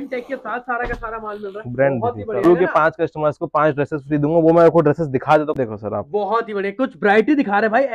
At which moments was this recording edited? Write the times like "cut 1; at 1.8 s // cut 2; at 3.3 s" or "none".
cut 1; at 2.4 s // cut 2; at 5.6 s